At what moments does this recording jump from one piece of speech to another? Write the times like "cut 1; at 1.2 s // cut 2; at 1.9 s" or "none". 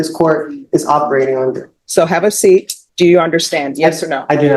cut 1; at 1.7 s // cut 2; at 2.8 s